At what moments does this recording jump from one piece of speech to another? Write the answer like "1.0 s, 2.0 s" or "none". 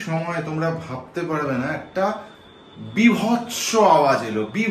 none